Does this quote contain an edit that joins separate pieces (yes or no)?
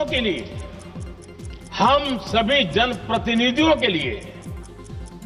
no